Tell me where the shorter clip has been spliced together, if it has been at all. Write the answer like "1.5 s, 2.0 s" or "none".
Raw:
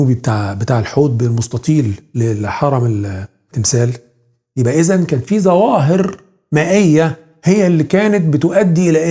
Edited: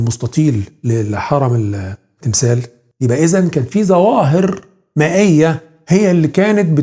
2.8 s